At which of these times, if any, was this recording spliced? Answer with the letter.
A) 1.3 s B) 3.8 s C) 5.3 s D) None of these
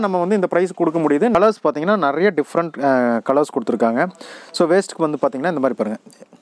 A